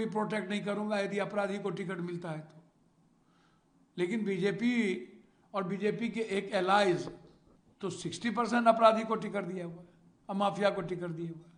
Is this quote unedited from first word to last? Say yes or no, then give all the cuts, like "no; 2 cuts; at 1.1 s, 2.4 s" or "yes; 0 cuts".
yes; 0 cuts